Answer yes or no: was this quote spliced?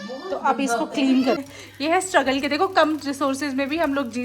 yes